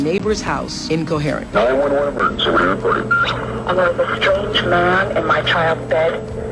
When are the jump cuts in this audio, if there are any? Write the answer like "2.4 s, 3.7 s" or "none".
none